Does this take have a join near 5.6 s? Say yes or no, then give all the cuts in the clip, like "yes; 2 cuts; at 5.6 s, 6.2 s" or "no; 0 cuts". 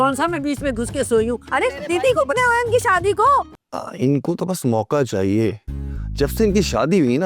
no; 1 cut; at 3.5 s